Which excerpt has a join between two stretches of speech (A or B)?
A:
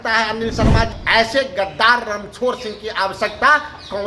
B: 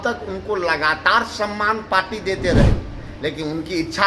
A